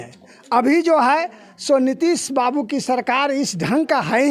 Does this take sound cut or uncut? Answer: uncut